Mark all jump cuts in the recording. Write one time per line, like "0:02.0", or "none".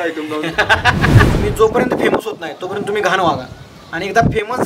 0:01.3

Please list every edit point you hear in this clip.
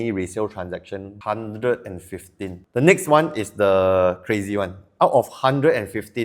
0:01.1
0:02.6

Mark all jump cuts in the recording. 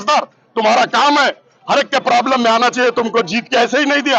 none

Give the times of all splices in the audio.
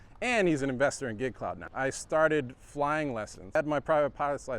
0:01.5
0:03.6

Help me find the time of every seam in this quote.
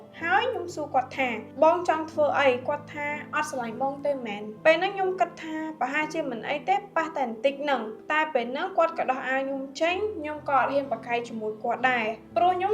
0:04.5
0:08.0

